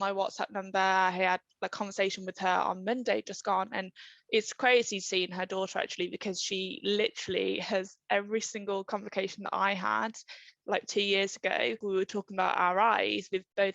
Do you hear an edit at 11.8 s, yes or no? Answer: yes